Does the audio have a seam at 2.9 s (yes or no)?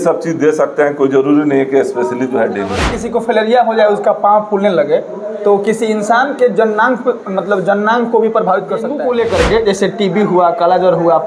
yes